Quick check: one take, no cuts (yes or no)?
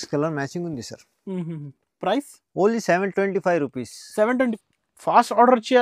no